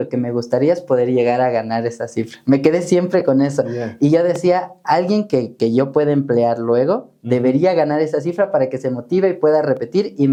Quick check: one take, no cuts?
yes; 0 cuts

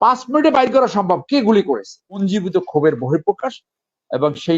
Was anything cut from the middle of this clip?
yes; 1 cut; at 2.2 s

